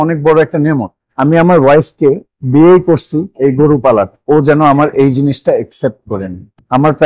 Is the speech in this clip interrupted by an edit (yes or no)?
yes